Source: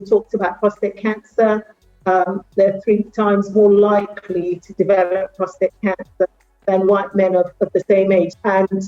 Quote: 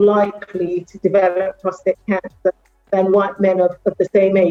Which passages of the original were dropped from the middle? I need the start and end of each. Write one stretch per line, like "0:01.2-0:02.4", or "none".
none